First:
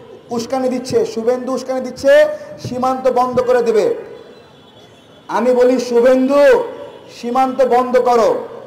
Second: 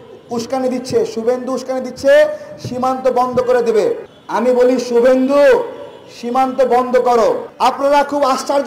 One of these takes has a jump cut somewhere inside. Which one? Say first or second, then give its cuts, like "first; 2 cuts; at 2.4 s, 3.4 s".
second; 2 cuts; at 4.1 s, 7.5 s